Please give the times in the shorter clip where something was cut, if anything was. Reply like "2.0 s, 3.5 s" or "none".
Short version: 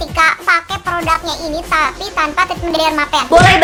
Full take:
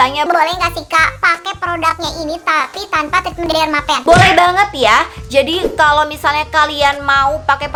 none